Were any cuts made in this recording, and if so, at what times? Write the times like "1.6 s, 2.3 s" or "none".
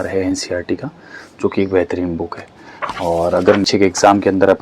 3.7 s